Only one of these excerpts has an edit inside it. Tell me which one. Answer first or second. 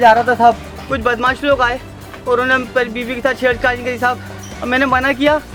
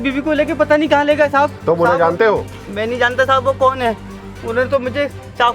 second